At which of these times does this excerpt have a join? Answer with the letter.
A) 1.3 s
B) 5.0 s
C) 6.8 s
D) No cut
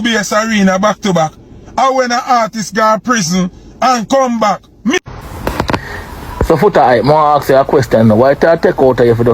B